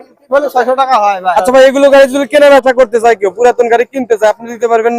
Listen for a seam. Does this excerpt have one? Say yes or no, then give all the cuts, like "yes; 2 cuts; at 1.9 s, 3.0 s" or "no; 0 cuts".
yes; 1 cut; at 1.3 s